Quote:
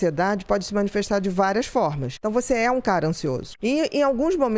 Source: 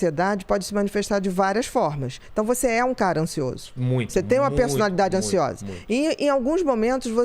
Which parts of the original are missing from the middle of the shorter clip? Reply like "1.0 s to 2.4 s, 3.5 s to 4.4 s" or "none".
2.1 s to 2.2 s, 3.6 s to 5.8 s